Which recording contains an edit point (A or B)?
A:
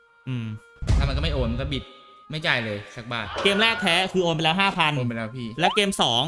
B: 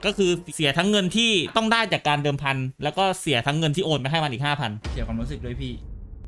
A